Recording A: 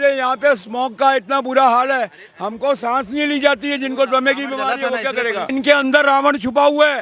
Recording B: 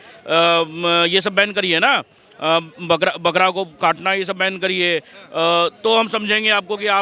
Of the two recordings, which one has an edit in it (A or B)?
A